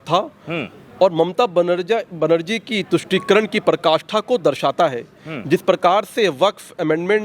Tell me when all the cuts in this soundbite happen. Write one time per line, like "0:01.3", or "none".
none